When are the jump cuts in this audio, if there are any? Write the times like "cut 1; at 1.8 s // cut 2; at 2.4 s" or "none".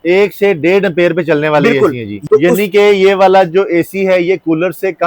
cut 1; at 2.2 s